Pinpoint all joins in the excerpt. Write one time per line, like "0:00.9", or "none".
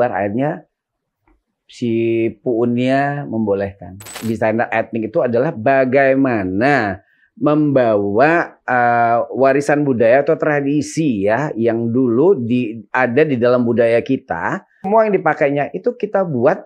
0:04.2
0:14.8